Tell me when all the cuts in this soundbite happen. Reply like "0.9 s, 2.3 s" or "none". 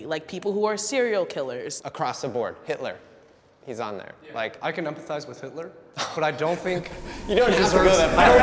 1.7 s, 4.5 s